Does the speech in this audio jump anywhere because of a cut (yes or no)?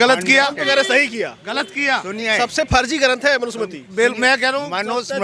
no